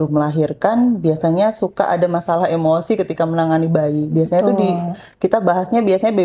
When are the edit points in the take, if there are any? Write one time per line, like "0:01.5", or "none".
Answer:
none